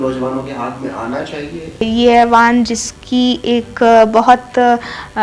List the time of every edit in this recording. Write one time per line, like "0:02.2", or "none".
0:01.9